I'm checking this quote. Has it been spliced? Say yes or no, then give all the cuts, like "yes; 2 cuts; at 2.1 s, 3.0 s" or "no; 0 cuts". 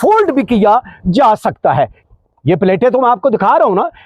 no; 0 cuts